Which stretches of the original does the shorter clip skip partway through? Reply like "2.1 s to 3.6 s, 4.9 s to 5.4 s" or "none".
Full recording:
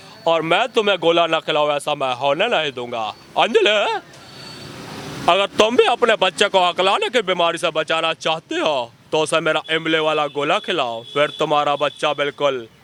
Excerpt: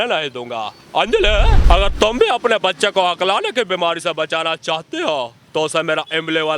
4.0 s to 5.2 s